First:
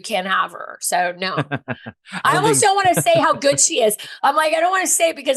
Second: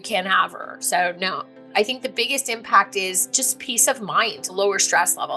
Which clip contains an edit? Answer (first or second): second